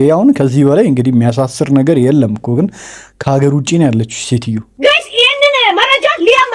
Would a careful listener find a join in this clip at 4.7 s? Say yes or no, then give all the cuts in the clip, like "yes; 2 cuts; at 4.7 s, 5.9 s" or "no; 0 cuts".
yes; 1 cut; at 4.7 s